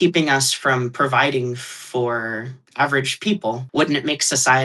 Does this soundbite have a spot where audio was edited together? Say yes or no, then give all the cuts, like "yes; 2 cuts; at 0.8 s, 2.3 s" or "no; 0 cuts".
yes; 1 cut; at 3.6 s